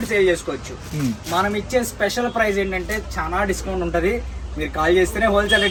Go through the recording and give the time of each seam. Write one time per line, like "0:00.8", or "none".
none